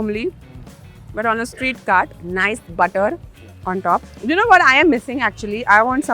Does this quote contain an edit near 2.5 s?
no; 1 cut; at 4.1 s

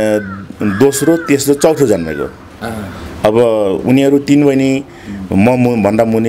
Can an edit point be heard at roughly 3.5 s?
no; 0 cuts

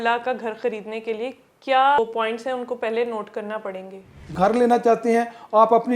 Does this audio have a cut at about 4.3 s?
yes; 2 cuts; at 2.0 s, 4.3 s

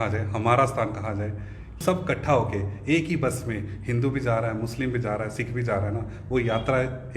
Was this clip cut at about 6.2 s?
no; 1 cut; at 1.8 s

